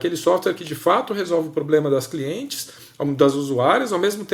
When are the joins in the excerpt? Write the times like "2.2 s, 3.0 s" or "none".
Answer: none